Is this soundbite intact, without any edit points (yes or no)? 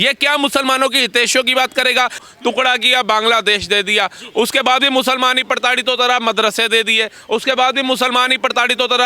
no